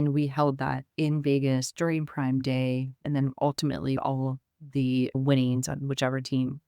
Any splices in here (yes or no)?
yes